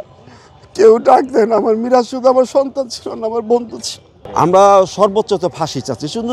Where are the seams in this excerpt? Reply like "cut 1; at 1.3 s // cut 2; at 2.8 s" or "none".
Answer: cut 1; at 4.3 s